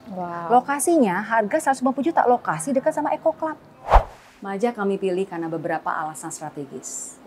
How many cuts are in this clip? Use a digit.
1